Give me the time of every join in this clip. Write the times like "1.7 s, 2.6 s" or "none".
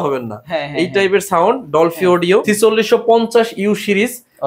2.4 s